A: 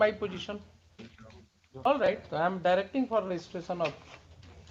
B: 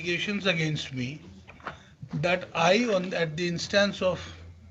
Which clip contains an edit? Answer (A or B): A